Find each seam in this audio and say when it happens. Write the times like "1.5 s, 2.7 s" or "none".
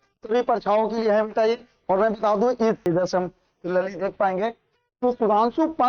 2.9 s